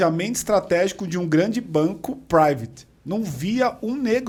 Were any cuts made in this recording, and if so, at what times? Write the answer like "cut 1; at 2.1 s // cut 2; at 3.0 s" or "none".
none